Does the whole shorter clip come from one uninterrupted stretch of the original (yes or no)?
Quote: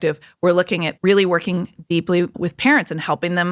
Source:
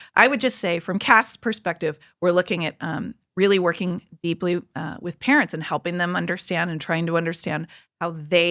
no